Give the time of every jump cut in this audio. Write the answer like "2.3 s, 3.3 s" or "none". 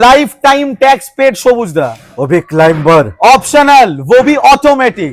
none